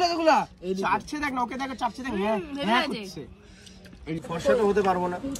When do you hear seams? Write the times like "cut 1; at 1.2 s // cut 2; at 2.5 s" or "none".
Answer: cut 1; at 4.2 s

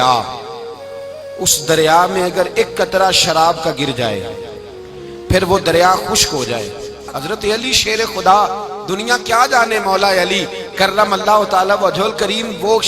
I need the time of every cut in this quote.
cut 1; at 7.0 s

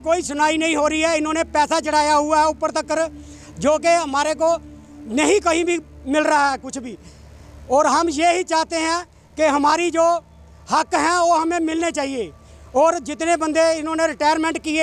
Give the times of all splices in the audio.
none

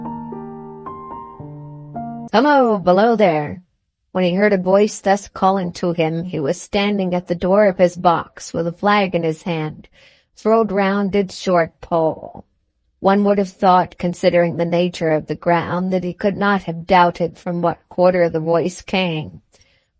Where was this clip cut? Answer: cut 1; at 2.3 s

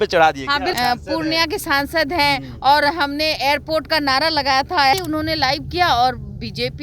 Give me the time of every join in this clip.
cut 1; at 0.8 s // cut 2; at 4.9 s

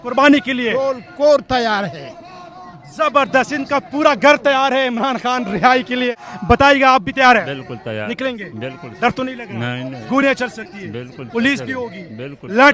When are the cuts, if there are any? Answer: cut 1; at 6.2 s

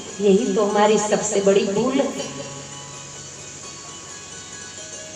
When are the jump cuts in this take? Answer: none

